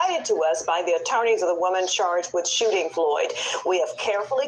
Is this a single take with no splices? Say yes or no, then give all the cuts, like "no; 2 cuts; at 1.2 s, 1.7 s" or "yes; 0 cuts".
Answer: yes; 0 cuts